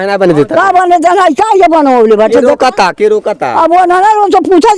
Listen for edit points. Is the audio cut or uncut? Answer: uncut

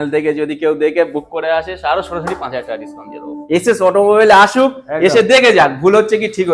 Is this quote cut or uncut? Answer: cut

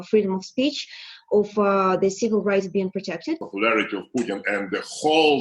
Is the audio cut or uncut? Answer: cut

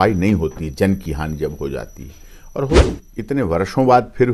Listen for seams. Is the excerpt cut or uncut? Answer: cut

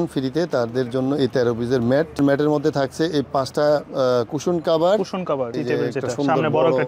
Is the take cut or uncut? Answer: cut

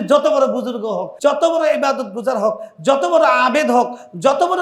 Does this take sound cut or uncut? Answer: cut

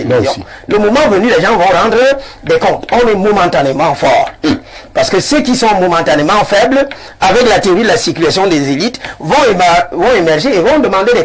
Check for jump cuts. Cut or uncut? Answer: uncut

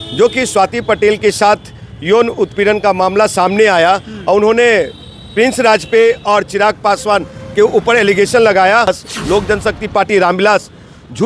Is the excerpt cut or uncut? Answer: cut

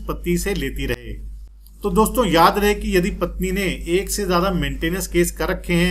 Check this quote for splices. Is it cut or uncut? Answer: uncut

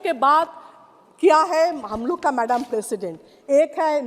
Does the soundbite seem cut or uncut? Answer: uncut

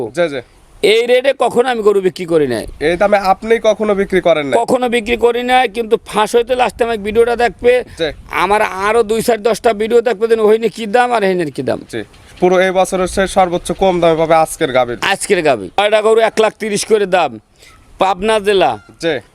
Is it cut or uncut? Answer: cut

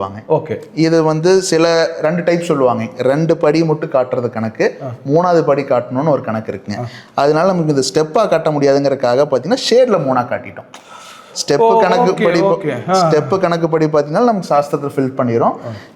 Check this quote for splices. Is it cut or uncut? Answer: uncut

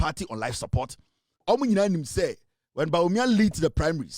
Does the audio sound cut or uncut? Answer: cut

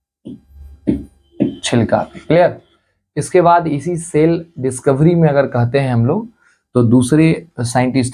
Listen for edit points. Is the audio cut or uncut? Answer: uncut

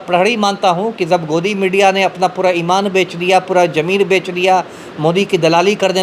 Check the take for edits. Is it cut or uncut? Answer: uncut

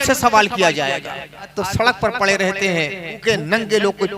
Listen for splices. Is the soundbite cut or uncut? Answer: cut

